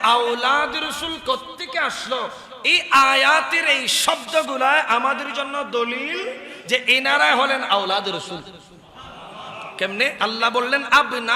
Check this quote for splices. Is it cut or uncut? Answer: cut